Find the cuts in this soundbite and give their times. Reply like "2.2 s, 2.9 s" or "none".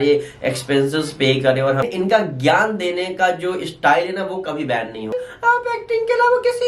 1.8 s, 5.2 s